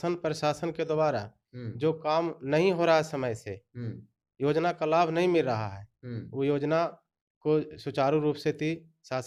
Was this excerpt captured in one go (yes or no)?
yes